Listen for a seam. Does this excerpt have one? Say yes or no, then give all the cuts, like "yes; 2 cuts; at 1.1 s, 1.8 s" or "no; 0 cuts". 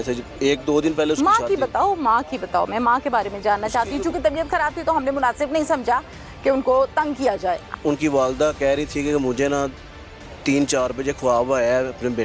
yes; 1 cut; at 7.7 s